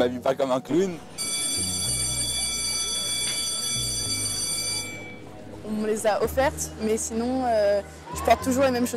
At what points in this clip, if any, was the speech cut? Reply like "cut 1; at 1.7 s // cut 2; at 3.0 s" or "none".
cut 1; at 0.9 s